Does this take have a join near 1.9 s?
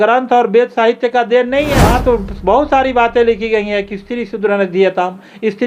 yes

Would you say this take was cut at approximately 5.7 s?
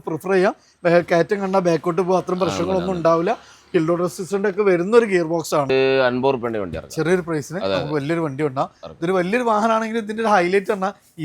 yes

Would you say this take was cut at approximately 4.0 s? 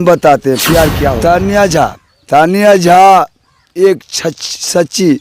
no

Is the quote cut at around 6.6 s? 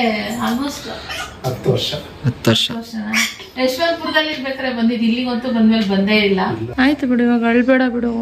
yes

